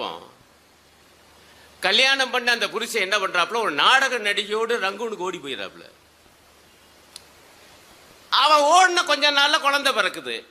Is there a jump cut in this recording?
no; 0 cuts

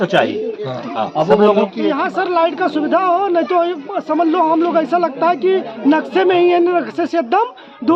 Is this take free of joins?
no; 1 cut; at 1.8 s

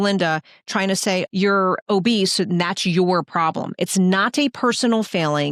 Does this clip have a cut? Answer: no; 0 cuts

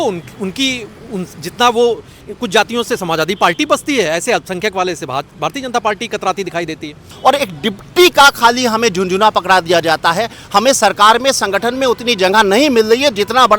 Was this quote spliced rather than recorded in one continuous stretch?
yes; 1 cut; at 7.1 s

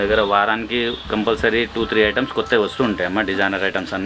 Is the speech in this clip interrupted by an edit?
no; 0 cuts

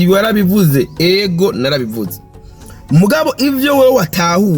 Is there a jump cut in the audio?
no; 0 cuts

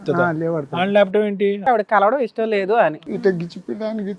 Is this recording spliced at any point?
yes; 2 cuts; at 1.6 s, 3.0 s

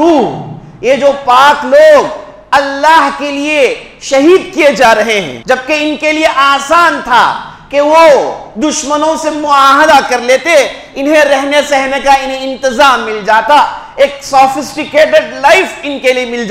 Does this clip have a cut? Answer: yes; 1 cut; at 5.3 s

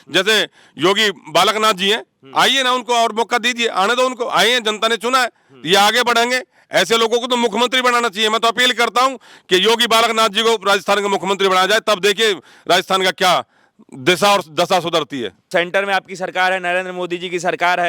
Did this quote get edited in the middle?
yes; 1 cut; at 15.4 s

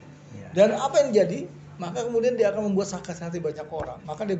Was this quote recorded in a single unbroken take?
yes; 0 cuts

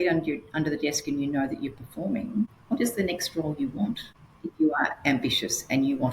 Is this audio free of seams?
no; 2 cuts; at 2.6 s, 4.5 s

